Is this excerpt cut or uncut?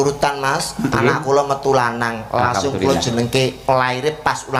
uncut